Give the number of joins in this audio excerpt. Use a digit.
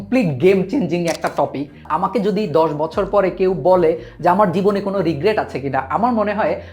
1